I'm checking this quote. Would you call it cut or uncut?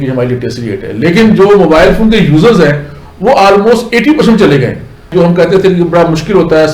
cut